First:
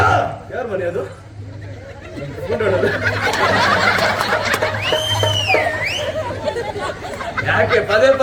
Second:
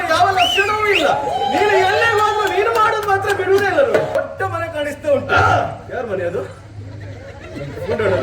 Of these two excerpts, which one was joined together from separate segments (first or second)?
second